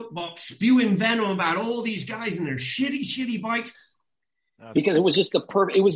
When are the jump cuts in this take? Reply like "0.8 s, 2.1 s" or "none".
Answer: 4.1 s